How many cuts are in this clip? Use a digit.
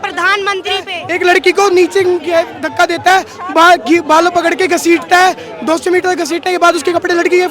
1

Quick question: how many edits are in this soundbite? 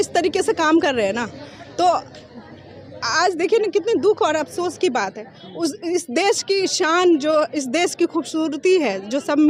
0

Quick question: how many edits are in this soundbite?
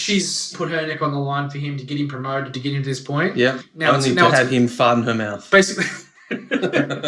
2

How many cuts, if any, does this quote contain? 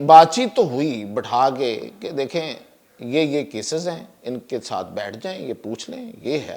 0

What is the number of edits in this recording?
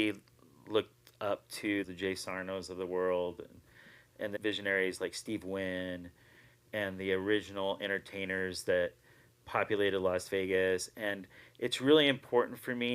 2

